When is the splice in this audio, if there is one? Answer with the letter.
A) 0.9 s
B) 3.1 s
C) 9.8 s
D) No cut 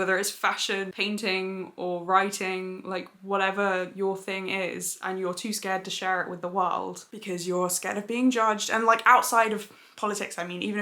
A